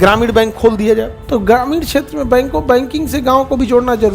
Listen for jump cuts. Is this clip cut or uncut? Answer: cut